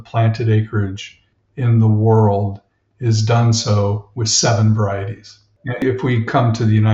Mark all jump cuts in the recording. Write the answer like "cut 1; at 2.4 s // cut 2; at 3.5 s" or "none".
cut 1; at 5.8 s

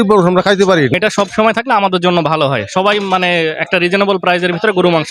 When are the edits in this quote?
cut 1; at 0.9 s

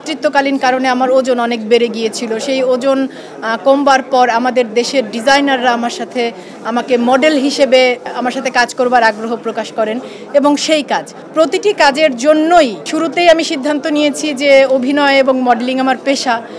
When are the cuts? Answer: none

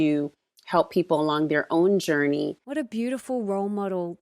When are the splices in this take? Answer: cut 1; at 2.6 s

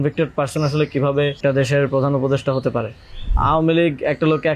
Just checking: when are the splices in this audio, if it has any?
cut 1; at 1.4 s // cut 2; at 3.3 s

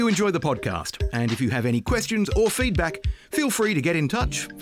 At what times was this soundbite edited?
none

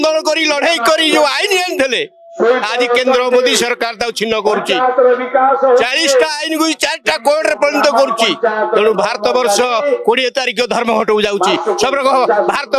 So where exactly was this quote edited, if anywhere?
none

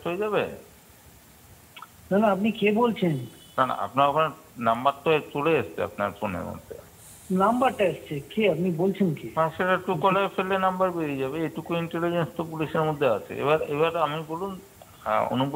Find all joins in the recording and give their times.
cut 1; at 11.9 s

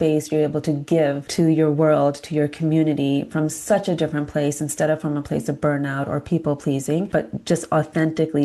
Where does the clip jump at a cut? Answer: cut 1; at 1.2 s // cut 2; at 7.1 s

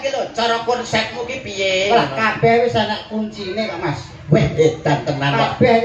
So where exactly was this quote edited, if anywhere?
none

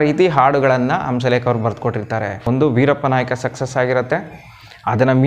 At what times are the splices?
cut 1; at 2.4 s

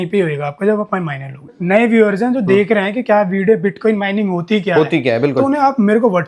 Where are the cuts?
cut 1; at 1.5 s

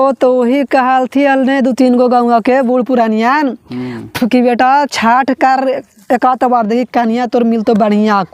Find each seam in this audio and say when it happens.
none

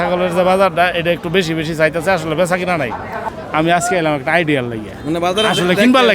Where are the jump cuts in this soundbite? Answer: cut 1; at 3.3 s

